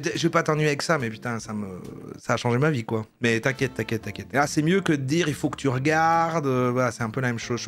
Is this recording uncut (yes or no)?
yes